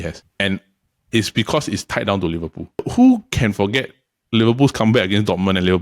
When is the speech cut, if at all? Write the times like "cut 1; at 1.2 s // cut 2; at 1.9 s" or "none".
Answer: cut 1; at 2.9 s